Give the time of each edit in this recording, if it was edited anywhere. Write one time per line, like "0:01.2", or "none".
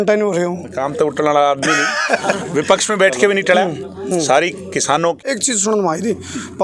0:05.3